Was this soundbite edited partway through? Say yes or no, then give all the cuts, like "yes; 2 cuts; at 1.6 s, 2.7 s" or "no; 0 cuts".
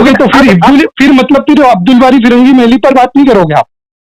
no; 0 cuts